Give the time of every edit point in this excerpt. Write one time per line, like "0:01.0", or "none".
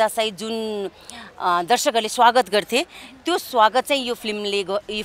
none